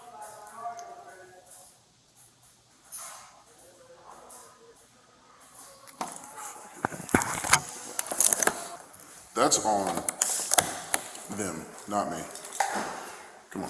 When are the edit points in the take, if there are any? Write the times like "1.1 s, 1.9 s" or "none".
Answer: 8.7 s